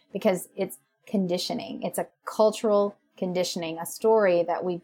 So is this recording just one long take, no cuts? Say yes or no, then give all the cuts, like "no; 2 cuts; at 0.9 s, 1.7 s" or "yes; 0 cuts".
no; 2 cuts; at 0.9 s, 2.2 s